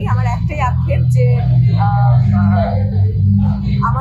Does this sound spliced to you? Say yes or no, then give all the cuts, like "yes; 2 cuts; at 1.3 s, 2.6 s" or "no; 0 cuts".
no; 0 cuts